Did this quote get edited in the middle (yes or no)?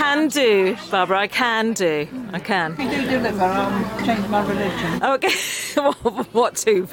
no